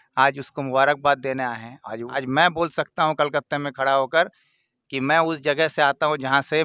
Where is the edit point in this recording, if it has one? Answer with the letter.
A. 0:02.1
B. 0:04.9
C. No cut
A